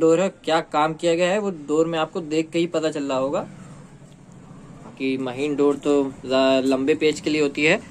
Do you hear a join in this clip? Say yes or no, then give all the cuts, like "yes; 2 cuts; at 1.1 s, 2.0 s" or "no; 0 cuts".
no; 0 cuts